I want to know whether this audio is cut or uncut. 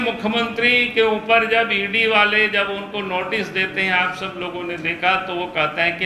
uncut